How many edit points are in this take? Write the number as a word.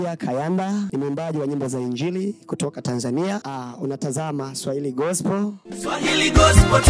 three